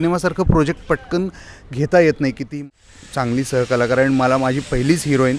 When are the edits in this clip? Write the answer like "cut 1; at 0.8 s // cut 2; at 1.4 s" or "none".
cut 1; at 2.5 s